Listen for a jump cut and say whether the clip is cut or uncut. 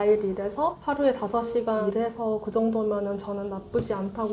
cut